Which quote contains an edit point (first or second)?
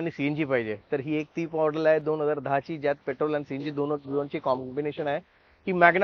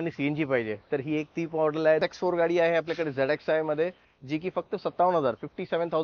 second